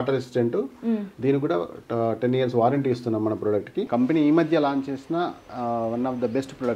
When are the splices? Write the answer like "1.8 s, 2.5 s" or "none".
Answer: 3.9 s